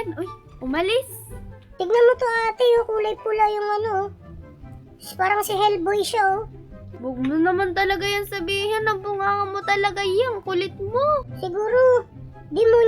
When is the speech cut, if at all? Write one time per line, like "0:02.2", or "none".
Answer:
0:01.7